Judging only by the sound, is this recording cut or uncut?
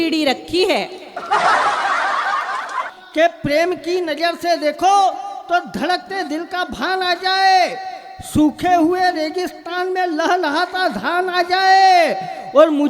cut